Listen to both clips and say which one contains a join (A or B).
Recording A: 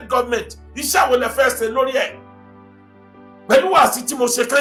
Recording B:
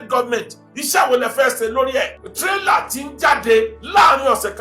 B